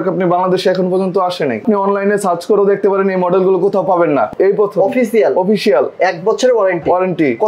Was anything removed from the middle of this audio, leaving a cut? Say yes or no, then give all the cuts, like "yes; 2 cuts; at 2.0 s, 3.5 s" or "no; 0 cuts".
yes; 2 cuts; at 1.6 s, 4.3 s